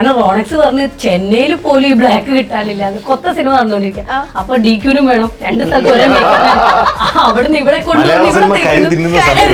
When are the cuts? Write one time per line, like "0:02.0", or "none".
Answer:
none